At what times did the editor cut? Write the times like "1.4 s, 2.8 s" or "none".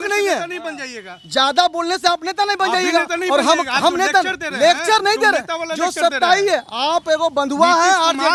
none